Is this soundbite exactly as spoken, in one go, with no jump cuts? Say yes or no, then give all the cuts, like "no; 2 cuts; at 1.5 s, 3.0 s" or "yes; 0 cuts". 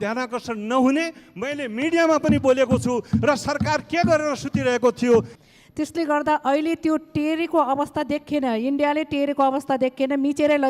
no; 1 cut; at 5.3 s